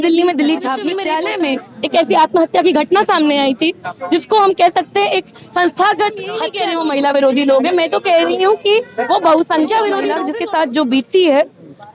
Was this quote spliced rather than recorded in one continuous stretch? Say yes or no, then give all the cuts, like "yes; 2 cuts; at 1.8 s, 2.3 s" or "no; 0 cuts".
yes; 3 cuts; at 1.0 s, 6.5 s, 10.2 s